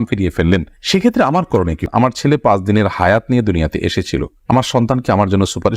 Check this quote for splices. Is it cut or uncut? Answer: cut